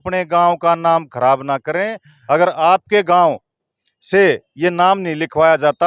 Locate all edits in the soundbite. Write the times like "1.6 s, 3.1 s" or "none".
2.1 s